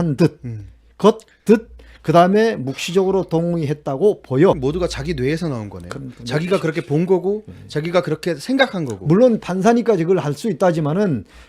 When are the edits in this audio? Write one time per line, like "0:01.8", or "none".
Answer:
0:04.6